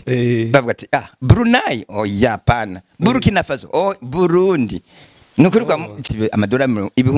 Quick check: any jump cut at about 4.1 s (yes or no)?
no